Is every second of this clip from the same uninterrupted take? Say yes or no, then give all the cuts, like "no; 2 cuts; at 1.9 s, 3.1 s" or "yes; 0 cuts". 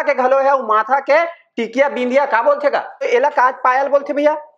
no; 1 cut; at 3.1 s